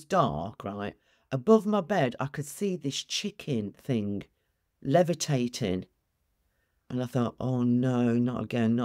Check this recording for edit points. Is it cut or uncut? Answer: uncut